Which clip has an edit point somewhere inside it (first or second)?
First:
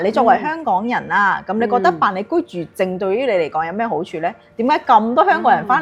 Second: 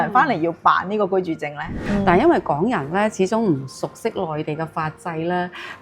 second